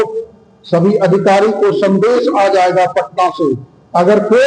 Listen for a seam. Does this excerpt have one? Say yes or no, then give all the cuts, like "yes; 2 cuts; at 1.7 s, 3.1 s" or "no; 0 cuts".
no; 0 cuts